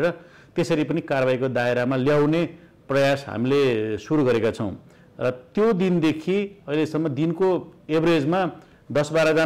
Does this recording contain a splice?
no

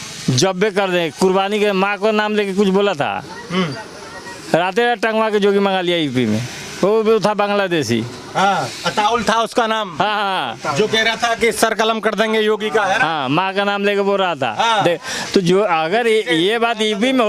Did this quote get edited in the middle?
no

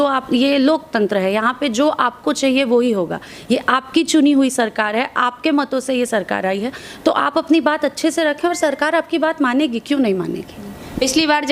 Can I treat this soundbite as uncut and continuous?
yes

